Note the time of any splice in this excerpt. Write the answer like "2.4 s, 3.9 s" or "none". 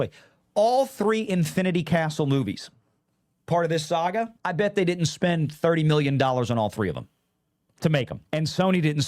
4.4 s, 8.2 s